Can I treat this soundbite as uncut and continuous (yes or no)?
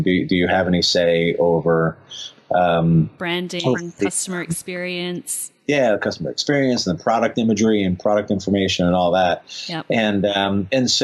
yes